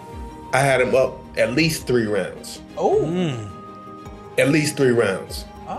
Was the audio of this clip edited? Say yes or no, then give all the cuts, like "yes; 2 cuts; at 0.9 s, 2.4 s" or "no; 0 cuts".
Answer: no; 0 cuts